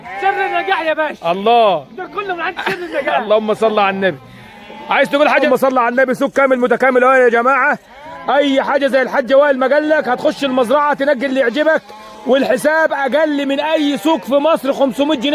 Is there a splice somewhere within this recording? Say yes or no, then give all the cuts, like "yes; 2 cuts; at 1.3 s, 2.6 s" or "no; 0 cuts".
yes; 1 cut; at 5.5 s